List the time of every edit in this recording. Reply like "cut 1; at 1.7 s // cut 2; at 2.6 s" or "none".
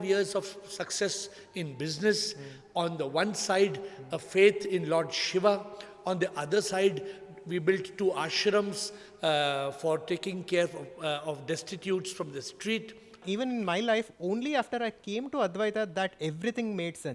cut 1; at 13.2 s